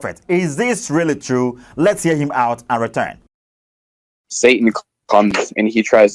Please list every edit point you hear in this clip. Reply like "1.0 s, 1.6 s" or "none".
none